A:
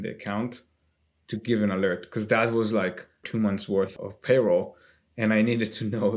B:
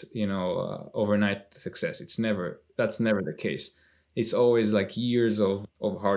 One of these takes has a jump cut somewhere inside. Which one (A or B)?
A